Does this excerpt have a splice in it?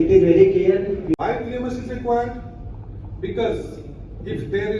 yes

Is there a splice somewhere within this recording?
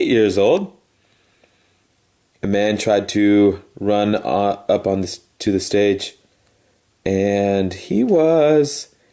yes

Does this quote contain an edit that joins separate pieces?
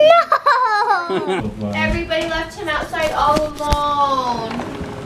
yes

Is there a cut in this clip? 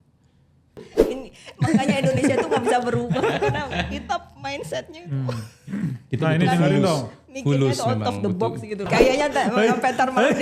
yes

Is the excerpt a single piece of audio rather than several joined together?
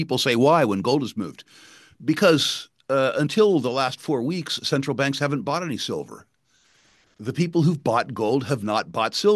yes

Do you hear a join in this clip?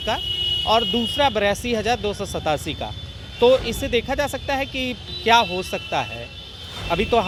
no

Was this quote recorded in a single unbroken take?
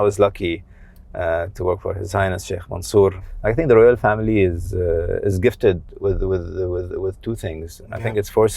no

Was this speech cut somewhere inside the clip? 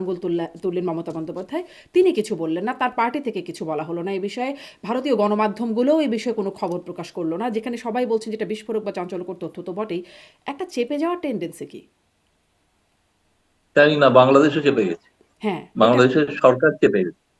no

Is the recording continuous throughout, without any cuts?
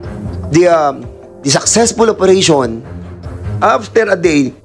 yes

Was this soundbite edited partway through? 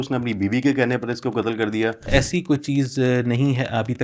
yes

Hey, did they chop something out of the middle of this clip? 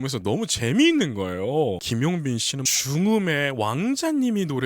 yes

